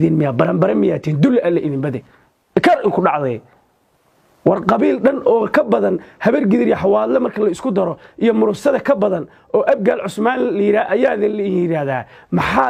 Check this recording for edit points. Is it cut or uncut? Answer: uncut